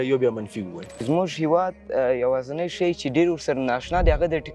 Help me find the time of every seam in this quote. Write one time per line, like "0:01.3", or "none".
0:01.0